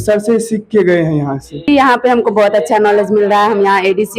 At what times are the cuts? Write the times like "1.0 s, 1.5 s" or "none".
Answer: 1.7 s